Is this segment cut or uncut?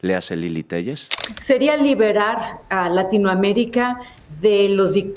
cut